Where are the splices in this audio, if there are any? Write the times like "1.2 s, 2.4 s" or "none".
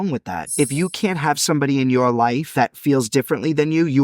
2.5 s